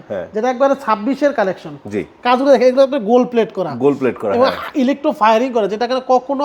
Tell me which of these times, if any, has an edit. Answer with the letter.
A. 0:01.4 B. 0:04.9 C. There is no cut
C